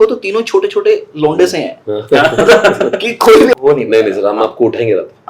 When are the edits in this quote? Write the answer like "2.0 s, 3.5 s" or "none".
3.5 s